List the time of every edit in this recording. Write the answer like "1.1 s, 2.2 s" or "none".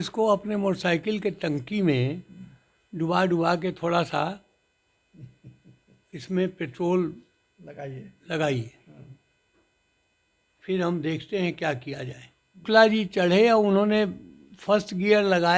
12.6 s

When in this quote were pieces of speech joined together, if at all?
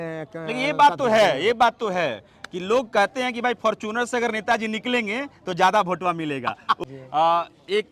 6.8 s

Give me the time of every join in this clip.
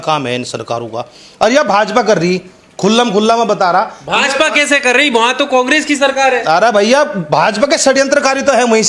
none

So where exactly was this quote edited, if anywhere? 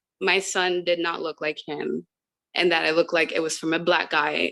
none

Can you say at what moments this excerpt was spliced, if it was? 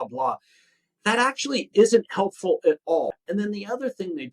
3.1 s

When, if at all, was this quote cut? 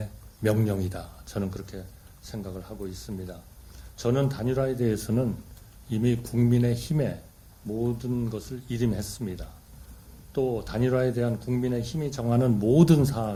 none

